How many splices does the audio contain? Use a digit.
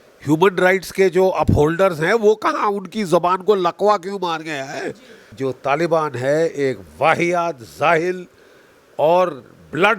1